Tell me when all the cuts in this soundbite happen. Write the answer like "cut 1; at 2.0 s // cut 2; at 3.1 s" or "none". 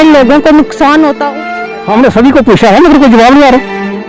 cut 1; at 1.4 s